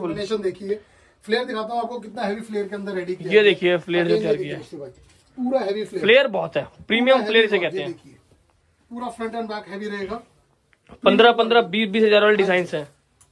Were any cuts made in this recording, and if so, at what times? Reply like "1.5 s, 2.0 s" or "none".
none